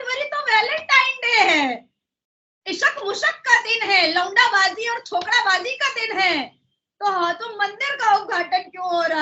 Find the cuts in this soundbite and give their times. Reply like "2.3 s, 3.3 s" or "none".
none